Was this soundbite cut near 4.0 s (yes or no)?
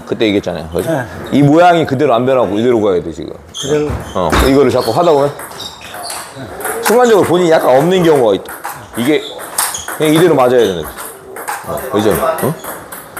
no